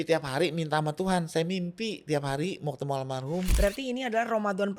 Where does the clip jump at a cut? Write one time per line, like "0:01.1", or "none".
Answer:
0:03.5